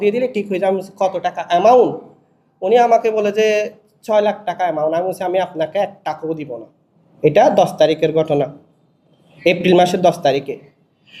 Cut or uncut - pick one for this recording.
uncut